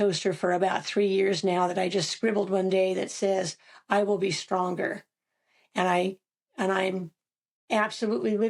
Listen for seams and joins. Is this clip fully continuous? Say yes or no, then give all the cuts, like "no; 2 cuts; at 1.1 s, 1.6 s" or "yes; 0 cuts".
yes; 0 cuts